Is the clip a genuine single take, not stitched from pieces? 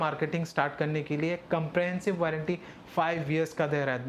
yes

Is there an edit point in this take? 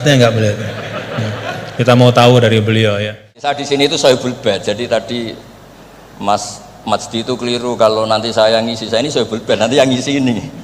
yes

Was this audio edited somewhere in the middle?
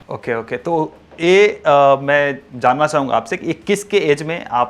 no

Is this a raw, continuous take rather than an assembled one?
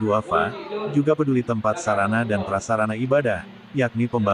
yes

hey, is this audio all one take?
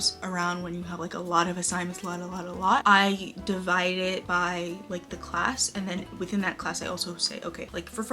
yes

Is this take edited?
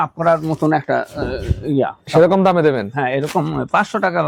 no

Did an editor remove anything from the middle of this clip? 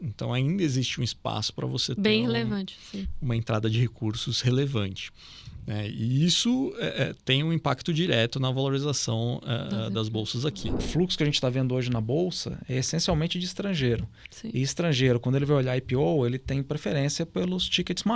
yes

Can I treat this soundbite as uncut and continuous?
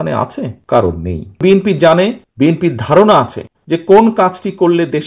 no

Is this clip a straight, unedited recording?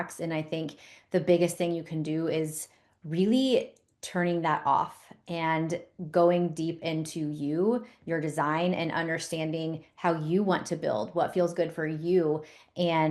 yes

